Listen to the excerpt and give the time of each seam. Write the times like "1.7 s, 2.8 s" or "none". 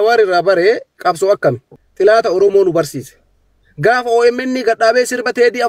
1.7 s